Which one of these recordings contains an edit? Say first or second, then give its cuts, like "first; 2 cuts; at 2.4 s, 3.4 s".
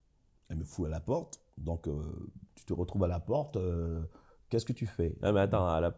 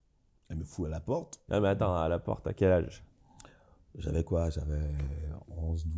second; 1 cut; at 1.4 s